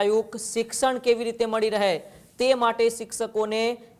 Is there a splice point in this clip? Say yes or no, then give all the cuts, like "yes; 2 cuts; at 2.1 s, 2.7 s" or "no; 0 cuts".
no; 0 cuts